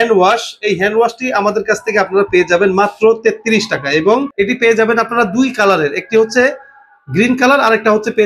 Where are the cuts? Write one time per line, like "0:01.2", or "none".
0:04.3